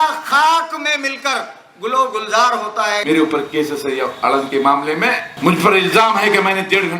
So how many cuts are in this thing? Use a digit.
2